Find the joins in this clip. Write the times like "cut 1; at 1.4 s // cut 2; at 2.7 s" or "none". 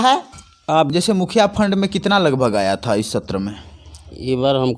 cut 1; at 0.9 s